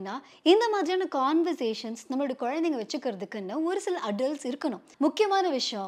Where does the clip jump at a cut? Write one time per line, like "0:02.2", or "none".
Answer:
0:04.9